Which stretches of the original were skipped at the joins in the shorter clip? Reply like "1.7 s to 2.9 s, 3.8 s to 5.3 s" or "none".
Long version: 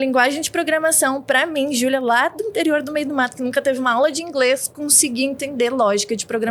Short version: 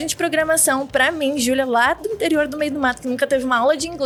none